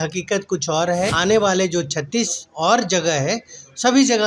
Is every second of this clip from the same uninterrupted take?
no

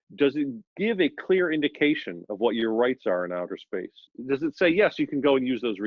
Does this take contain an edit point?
yes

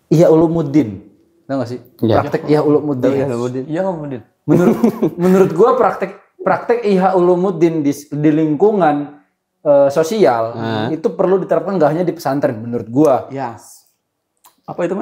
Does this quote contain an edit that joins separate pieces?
no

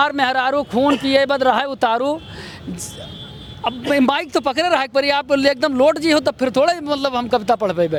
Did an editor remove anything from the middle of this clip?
no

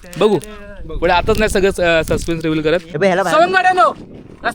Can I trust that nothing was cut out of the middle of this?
no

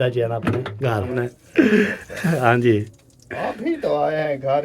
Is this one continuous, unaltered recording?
no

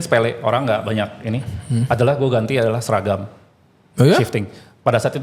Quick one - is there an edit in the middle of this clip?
no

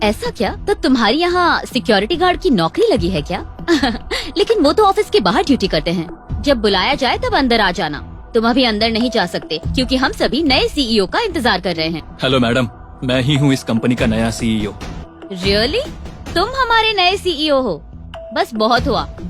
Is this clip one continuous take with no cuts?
no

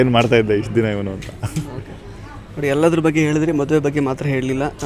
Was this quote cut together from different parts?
no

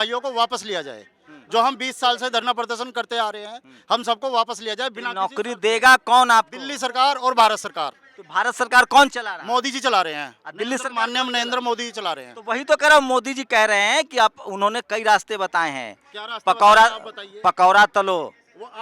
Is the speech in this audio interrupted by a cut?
no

